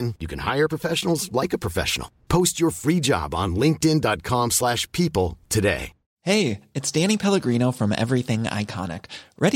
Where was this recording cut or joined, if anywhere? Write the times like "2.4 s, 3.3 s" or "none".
6.1 s